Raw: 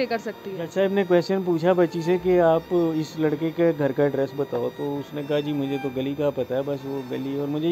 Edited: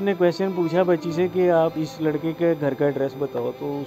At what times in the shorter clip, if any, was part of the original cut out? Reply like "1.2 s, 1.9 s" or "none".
1.8 s